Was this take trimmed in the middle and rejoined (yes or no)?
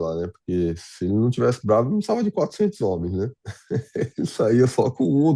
no